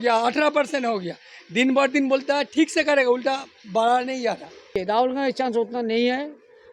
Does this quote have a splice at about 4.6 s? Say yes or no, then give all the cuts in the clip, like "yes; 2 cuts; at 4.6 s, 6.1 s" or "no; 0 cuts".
yes; 1 cut; at 4.6 s